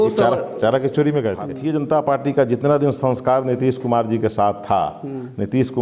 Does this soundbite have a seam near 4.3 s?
no; 1 cut; at 1.5 s

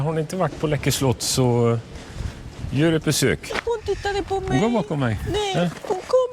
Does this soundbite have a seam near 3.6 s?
yes; 1 cut; at 3.6 s

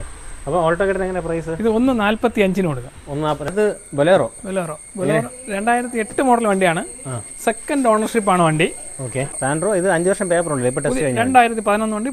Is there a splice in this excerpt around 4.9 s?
no; 2 cuts; at 3.5 s, 9.3 s

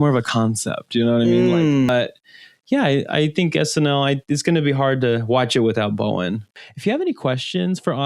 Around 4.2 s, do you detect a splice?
no; 2 cuts; at 1.9 s, 6.6 s

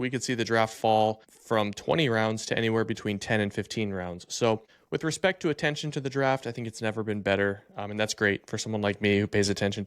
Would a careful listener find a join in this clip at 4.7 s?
yes; 2 cuts; at 1.3 s, 4.7 s

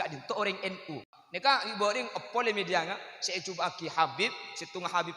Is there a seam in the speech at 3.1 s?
no; 1 cut; at 1.0 s

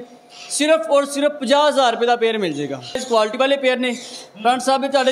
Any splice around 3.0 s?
yes; 1 cut; at 3.0 s

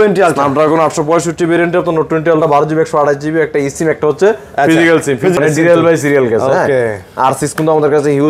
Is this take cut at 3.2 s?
no; 1 cut; at 5.4 s

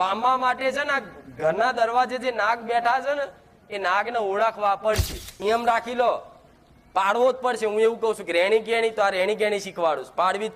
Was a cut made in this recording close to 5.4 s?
yes; 1 cut; at 5.4 s

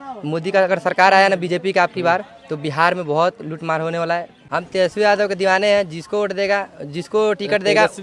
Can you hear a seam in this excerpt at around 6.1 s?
no; 1 cut; at 4.4 s

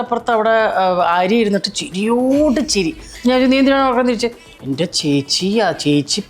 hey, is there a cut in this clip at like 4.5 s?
no; 1 cut; at 3.1 s

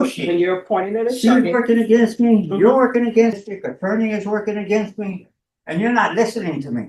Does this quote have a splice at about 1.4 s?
no; 1 cut; at 3.4 s

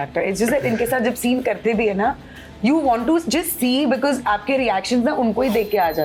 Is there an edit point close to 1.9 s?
no; 0 cuts

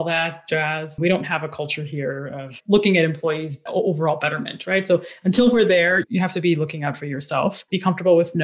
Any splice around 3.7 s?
yes; 4 cuts; at 0.9 s, 3.7 s, 6.1 s, 7.6 s

